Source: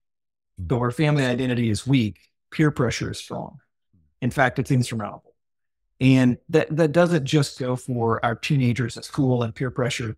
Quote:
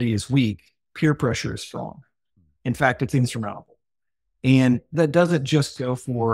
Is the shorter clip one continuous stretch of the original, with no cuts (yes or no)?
no